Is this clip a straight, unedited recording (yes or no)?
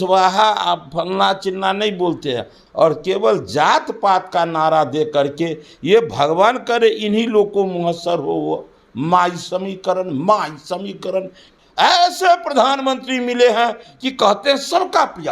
no